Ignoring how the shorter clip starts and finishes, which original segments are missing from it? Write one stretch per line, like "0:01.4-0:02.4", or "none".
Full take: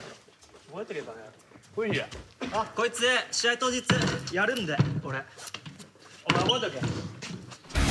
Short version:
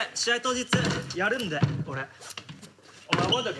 none